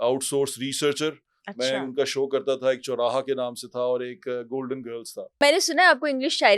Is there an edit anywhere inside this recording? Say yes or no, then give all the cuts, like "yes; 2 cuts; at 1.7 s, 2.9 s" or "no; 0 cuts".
yes; 1 cut; at 5.4 s